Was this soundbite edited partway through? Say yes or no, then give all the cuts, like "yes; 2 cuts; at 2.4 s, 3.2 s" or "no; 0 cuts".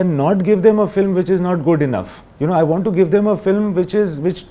no; 0 cuts